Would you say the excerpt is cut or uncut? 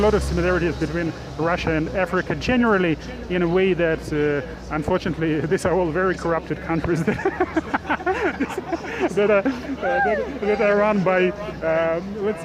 uncut